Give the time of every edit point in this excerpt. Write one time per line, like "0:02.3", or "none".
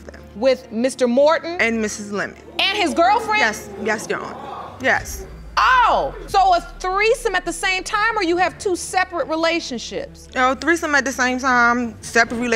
none